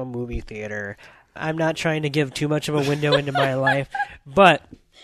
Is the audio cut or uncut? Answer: cut